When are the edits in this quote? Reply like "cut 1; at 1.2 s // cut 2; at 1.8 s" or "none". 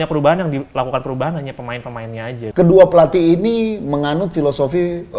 cut 1; at 2.4 s